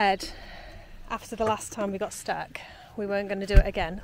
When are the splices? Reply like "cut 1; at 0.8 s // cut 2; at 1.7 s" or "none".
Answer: none